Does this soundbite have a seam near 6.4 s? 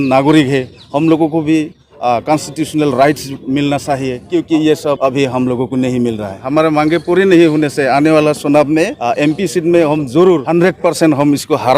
yes; 5 cuts; at 4.2 s, 5.0 s, 6.4 s, 9.0 s, 10.4 s

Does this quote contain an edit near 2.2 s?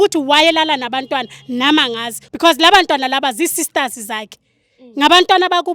yes; 1 cut; at 2.2 s

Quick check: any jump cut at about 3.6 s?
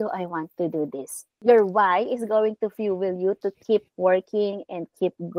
no; 1 cut; at 1.3 s

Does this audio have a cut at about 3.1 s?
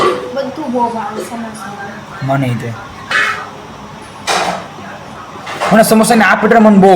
yes; 1 cut; at 3.1 s

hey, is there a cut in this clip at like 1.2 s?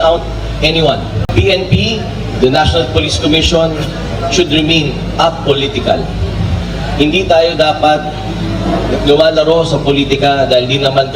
yes; 1 cut; at 1.2 s

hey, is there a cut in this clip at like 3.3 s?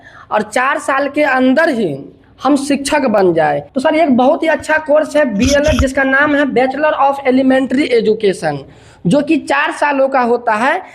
yes; 1 cut; at 3.3 s

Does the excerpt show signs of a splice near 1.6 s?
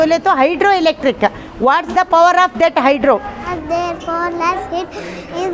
no; 1 cut; at 3.5 s

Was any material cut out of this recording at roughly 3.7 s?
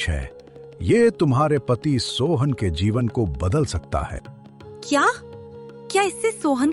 no; 0 cuts

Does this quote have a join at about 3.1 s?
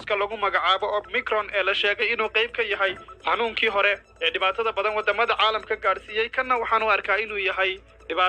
yes; 2 cuts; at 3.1 s, 4.1 s

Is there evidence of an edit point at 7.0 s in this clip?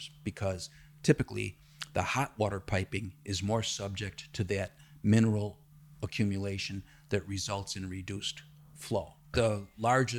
no; 1 cut; at 9.2 s

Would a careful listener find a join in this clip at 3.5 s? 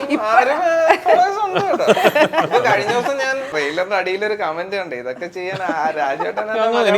yes; 1 cut; at 3.5 s

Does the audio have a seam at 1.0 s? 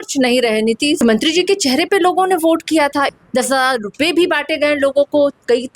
yes; 2 cuts; at 1.0 s, 3.1 s

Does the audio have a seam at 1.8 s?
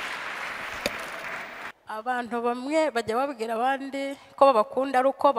yes; 1 cut; at 1.8 s

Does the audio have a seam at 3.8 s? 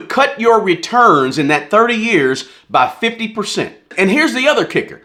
no; 0 cuts

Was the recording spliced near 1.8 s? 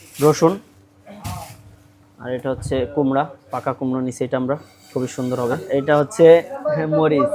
no; 1 cut; at 5.6 s

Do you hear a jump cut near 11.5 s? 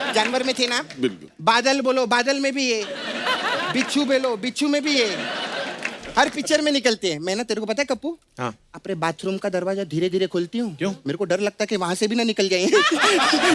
no; 0 cuts

